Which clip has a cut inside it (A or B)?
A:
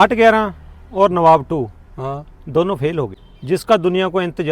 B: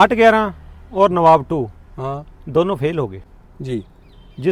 A